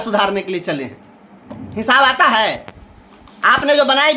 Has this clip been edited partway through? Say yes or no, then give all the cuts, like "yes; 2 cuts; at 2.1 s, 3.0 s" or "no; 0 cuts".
no; 0 cuts